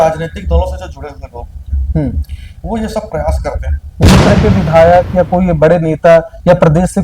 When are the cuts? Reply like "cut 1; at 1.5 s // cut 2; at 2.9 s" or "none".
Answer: cut 1; at 4.0 s